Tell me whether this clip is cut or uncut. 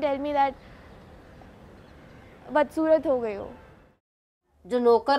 cut